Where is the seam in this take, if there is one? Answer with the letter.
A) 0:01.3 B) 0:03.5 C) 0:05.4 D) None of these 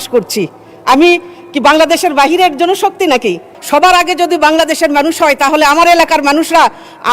B